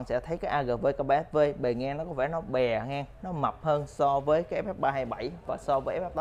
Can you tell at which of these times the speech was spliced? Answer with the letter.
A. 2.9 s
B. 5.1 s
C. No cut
C